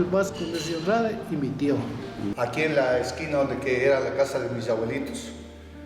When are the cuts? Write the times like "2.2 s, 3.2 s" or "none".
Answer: 2.2 s